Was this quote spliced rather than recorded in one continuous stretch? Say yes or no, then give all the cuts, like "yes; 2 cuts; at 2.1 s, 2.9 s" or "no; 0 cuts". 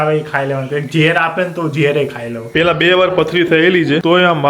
yes; 1 cut; at 2.4 s